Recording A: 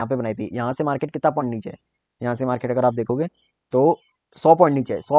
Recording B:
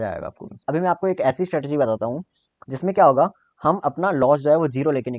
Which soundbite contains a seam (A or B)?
B